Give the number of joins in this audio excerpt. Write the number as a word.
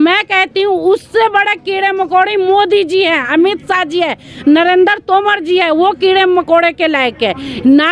zero